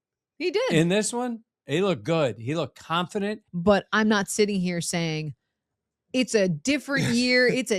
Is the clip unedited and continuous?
no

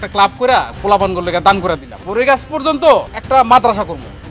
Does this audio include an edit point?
yes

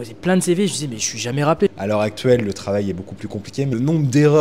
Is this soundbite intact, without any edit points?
no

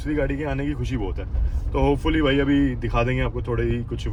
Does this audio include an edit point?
no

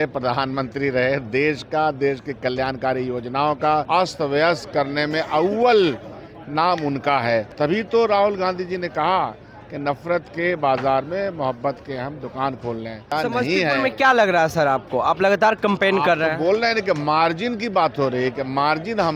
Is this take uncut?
no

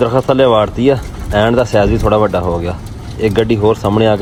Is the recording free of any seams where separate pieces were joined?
yes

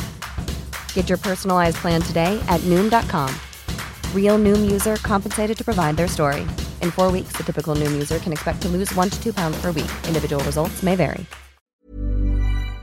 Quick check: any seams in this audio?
yes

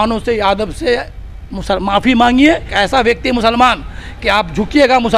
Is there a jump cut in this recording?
yes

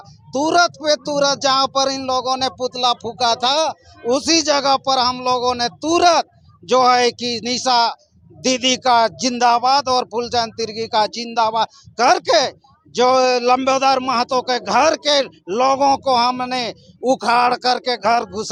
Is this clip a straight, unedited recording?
yes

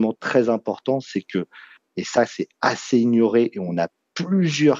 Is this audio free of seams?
yes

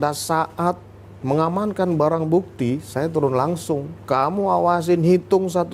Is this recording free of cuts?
yes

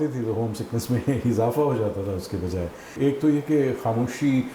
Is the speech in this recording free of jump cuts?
no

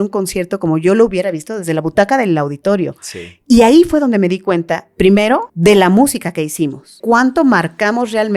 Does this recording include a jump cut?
yes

